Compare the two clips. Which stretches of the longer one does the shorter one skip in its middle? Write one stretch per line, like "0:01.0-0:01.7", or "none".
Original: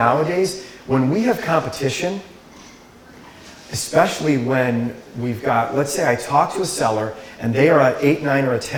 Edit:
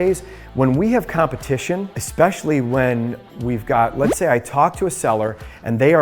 0:02.3-0:03.7